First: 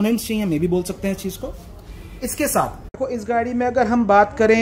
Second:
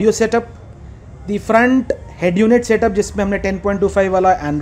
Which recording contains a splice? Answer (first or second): first